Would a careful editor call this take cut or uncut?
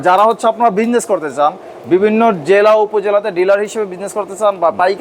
uncut